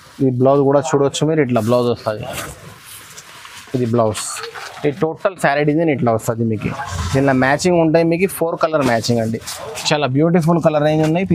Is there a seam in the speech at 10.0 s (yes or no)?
no